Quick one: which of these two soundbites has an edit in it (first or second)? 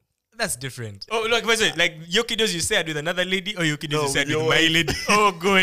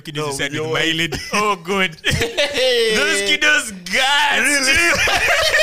first